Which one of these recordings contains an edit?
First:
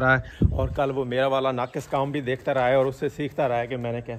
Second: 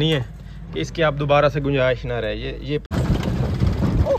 second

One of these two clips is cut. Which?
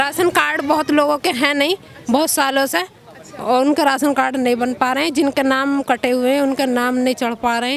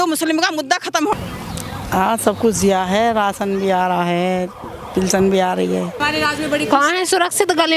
second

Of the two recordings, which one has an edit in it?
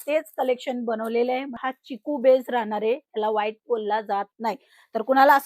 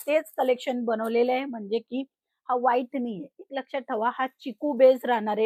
first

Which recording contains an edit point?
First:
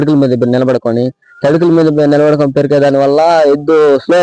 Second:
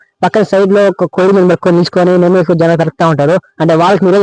second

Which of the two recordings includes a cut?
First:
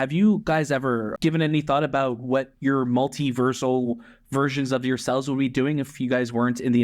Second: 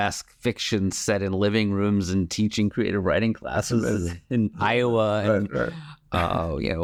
first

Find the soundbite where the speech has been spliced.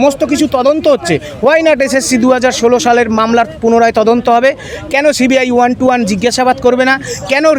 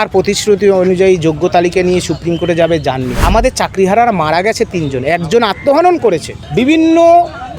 second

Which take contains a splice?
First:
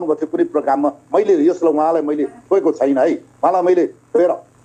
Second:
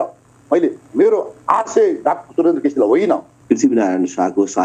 second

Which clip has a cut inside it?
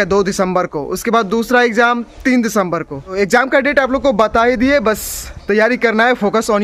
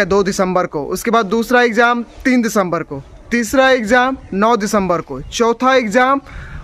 first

